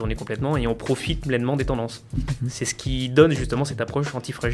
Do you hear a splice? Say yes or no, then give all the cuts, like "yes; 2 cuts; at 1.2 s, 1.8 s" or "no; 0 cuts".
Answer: no; 0 cuts